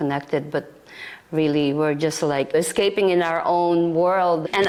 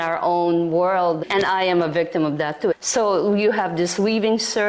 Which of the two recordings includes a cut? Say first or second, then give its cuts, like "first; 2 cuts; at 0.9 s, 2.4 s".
second; 1 cut; at 2.8 s